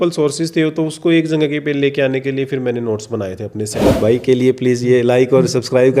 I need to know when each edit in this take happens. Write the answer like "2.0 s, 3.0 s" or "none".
3.8 s